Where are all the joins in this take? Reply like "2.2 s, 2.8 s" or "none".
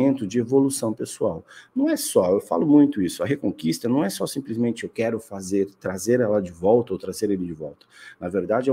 none